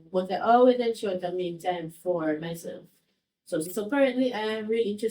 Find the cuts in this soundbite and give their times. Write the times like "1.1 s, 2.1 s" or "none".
3.7 s